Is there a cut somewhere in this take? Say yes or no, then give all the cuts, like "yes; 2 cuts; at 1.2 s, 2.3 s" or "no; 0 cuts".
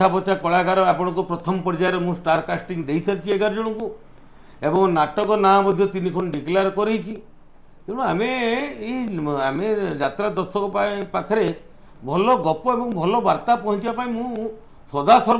no; 0 cuts